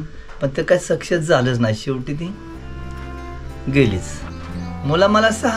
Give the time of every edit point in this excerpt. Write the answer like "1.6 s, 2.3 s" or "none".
none

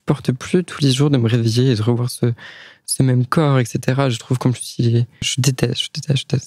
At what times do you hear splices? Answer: 5.3 s

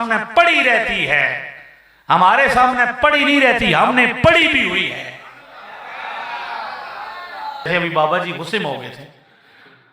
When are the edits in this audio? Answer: 7.7 s

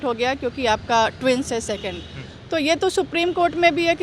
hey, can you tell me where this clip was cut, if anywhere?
none

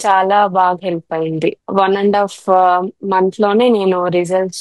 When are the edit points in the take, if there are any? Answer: 1.6 s

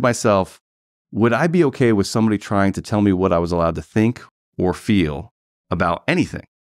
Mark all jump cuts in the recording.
none

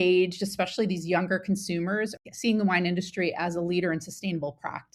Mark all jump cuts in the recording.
2.2 s

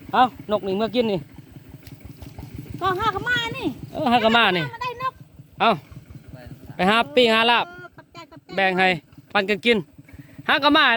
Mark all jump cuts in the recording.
none

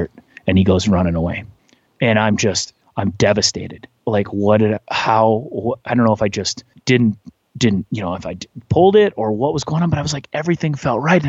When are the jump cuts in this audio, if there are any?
3.9 s

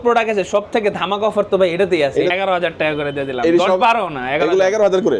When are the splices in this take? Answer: 2.3 s

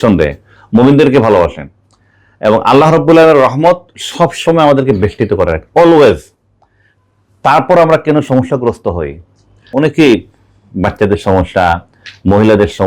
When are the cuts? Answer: 9.7 s

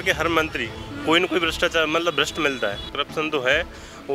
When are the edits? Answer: 2.9 s

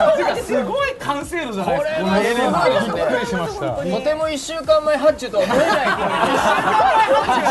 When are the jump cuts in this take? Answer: 4.0 s

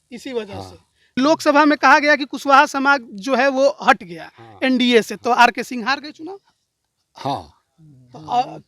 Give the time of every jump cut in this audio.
1.2 s

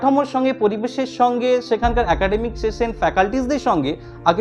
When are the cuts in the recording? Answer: none

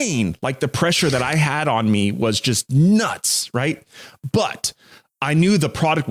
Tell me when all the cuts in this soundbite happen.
none

